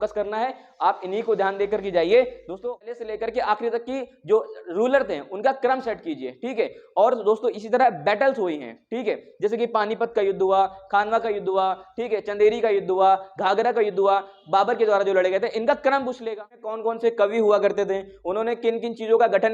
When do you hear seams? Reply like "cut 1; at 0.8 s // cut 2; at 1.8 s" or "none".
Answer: cut 1; at 2.7 s // cut 2; at 16.7 s